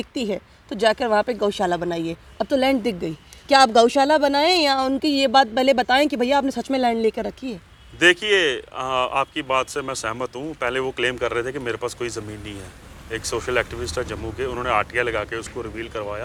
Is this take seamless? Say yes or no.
yes